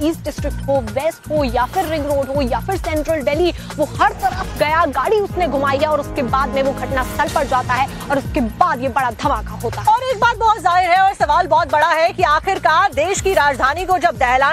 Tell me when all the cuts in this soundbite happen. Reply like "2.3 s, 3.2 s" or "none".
11.8 s